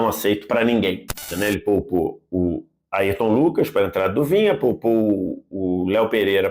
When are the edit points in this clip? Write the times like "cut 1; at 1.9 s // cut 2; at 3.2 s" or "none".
cut 1; at 1.2 s